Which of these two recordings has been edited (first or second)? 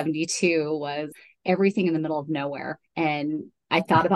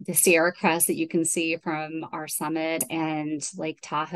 second